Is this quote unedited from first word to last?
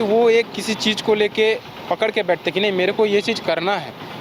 yes; 0 cuts

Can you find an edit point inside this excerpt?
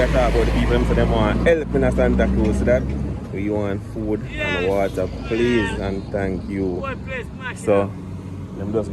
no; 0 cuts

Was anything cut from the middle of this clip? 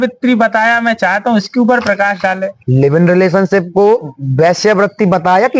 no; 0 cuts

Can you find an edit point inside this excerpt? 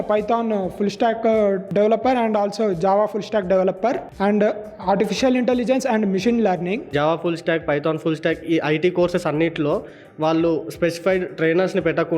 yes; 3 cuts; at 1.6 s, 4.1 s, 6.8 s

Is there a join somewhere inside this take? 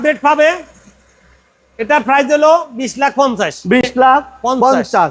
no; 0 cuts

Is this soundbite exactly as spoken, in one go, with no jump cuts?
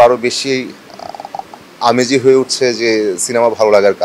yes; 0 cuts

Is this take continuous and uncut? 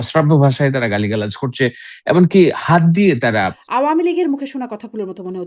no; 1 cut; at 3.6 s

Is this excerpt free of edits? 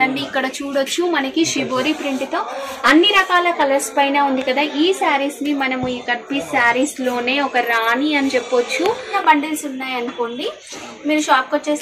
no; 1 cut; at 9.1 s

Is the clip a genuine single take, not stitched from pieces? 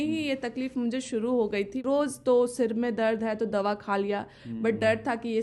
no; 1 cut; at 1.8 s

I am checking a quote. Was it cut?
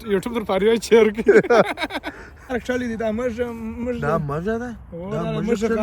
yes; 1 cut; at 2.5 s

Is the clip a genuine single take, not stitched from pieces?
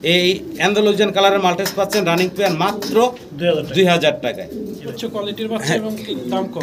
no; 1 cut; at 4.9 s

